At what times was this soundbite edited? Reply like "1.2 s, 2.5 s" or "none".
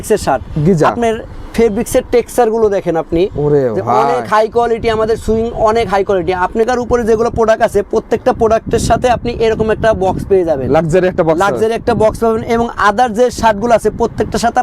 6.7 s